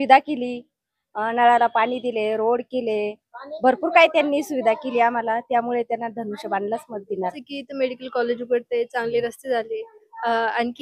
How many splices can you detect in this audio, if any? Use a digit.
1